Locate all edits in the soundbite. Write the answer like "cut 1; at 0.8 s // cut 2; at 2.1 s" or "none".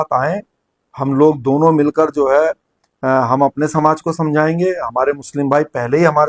none